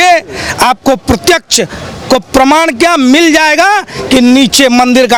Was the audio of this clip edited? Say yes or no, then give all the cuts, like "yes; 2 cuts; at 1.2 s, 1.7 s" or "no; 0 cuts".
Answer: no; 0 cuts